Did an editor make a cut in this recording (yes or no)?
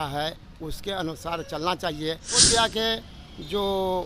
yes